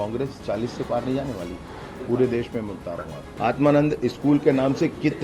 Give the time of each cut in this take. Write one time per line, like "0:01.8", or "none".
0:03.3